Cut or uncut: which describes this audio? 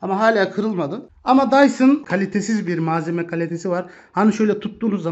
cut